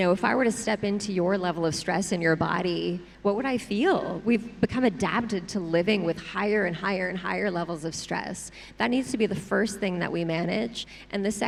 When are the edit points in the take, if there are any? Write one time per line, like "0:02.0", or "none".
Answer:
none